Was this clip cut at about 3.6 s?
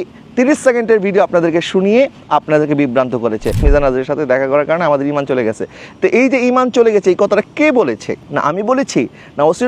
yes; 2 cuts; at 3.6 s, 8.2 s

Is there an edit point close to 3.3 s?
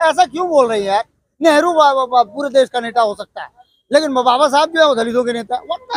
no; 0 cuts

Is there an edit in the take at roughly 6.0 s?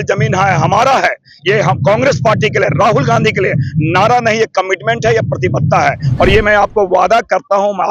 yes; 1 cut; at 6.0 s

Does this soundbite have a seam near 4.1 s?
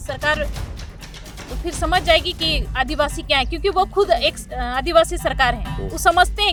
no; 0 cuts

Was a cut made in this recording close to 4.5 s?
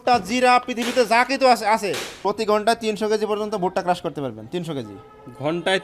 no; 1 cut; at 2.1 s

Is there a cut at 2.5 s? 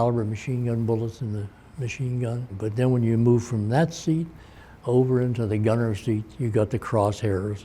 yes; 1 cut; at 2.5 s

